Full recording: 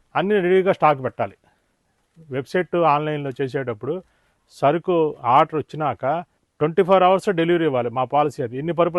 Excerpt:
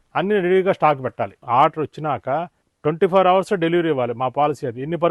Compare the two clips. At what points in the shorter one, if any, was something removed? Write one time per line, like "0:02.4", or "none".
0:01.4